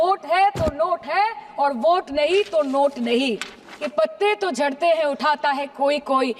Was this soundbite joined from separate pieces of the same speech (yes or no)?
yes